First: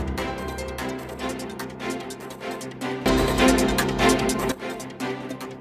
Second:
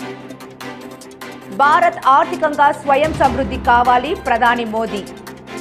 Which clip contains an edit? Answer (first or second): second